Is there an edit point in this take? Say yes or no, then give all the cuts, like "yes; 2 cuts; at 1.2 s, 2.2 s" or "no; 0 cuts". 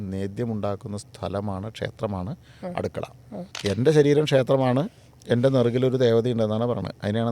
yes; 1 cut; at 3.5 s